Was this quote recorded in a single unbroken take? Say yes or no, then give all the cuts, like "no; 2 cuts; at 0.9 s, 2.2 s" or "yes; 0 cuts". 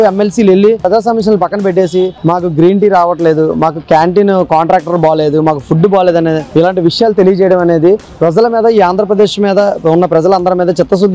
no; 2 cuts; at 0.8 s, 8.1 s